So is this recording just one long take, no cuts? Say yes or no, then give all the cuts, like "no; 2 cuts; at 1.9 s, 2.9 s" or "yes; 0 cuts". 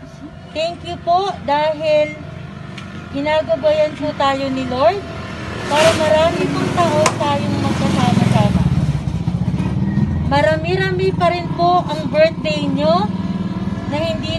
yes; 0 cuts